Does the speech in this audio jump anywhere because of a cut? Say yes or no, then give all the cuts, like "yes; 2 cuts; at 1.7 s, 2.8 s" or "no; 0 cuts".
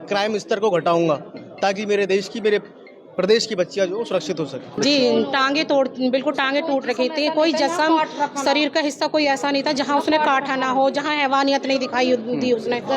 yes; 1 cut; at 4.7 s